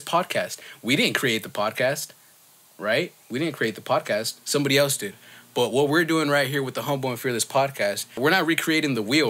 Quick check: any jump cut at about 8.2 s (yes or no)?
yes